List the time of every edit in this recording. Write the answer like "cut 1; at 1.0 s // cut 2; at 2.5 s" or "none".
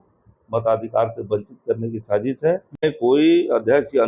cut 1; at 2.8 s